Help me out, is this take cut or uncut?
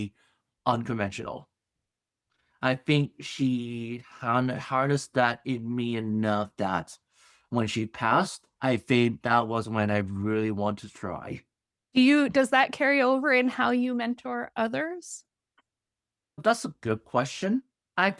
uncut